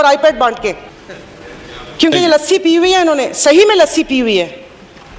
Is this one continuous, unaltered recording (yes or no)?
yes